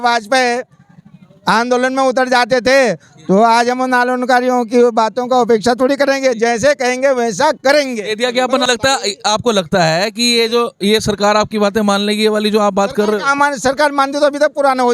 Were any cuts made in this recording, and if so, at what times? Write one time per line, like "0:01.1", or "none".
0:08.6